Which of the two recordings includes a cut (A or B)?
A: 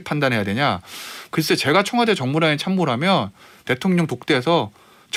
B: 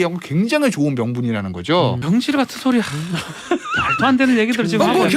B